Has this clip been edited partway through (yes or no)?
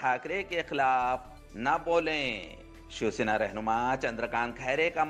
no